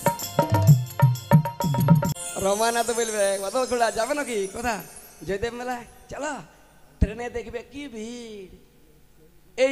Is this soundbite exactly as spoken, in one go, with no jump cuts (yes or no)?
no